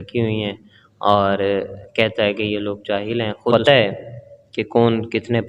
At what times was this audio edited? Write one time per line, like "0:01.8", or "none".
0:03.5